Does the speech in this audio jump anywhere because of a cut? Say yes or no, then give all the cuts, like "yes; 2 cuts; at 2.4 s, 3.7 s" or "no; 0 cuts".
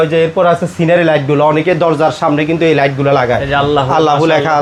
no; 0 cuts